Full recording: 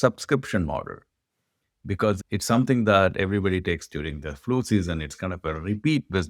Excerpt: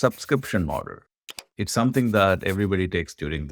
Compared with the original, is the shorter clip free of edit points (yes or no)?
no